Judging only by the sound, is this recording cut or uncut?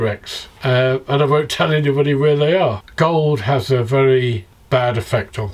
cut